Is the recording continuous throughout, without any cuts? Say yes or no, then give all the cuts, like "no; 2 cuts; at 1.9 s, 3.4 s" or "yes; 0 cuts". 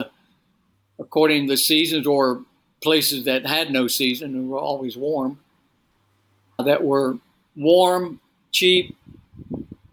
yes; 0 cuts